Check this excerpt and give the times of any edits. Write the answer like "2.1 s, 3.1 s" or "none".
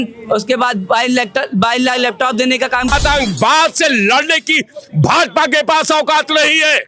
2.9 s